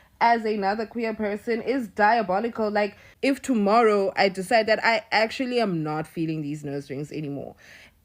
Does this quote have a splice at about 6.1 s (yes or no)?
no